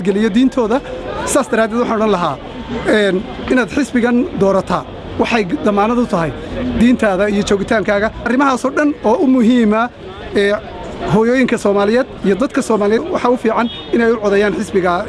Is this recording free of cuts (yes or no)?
no